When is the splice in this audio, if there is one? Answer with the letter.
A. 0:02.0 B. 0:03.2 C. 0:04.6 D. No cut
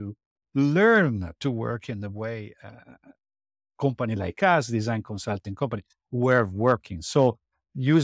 D